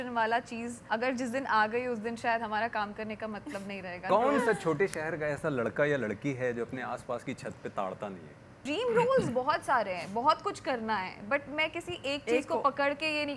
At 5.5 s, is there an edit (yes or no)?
no